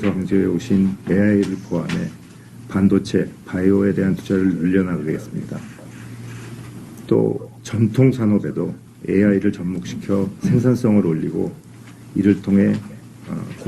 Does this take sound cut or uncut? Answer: cut